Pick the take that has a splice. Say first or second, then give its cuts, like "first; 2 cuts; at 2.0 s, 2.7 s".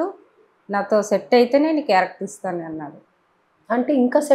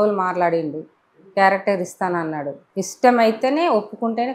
second; 1 cut; at 2.6 s